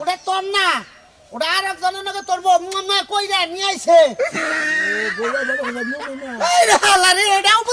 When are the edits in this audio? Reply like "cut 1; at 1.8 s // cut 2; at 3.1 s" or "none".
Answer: none